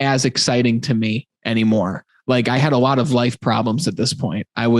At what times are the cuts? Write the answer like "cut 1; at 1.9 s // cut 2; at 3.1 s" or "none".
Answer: cut 1; at 2.1 s